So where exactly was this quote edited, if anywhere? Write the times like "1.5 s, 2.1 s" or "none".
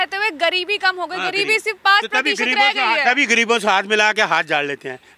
none